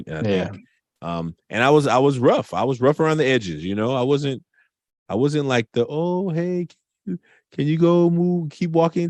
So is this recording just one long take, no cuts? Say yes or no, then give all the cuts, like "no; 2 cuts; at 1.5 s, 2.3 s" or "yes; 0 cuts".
yes; 0 cuts